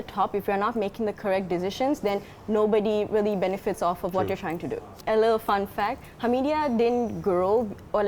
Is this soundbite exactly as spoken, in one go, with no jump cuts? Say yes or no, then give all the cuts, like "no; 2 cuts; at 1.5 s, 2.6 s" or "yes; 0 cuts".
no; 1 cut; at 4.9 s